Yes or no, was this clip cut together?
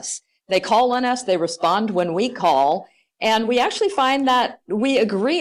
no